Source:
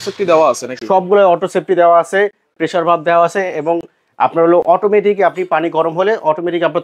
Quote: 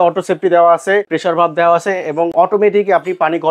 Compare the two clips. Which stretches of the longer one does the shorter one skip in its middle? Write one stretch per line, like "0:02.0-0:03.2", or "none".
0:02.4-0:02.6
0:03.8-0:04.6